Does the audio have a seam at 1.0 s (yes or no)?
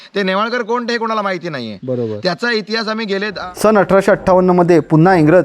no